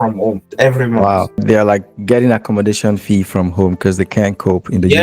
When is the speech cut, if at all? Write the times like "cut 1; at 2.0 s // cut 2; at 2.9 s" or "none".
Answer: cut 1; at 1.4 s